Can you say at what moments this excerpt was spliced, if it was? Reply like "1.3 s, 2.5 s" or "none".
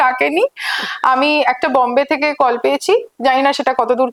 none